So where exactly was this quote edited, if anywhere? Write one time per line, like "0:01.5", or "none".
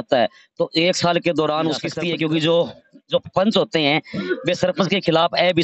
0:01.9